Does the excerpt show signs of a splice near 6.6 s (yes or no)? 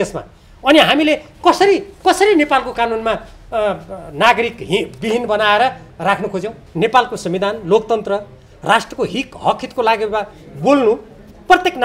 yes